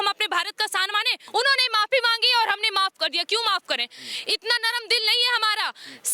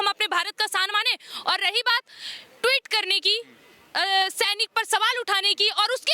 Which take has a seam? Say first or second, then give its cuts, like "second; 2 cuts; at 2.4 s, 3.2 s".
first; 1 cut; at 1.2 s